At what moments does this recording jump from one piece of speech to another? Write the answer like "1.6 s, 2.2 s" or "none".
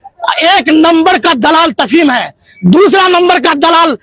none